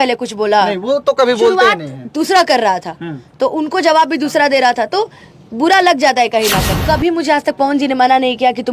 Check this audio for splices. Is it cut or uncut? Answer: cut